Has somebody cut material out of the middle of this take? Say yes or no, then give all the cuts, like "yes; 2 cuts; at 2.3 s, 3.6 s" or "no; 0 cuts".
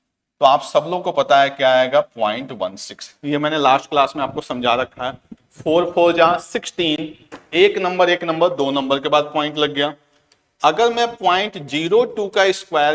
no; 0 cuts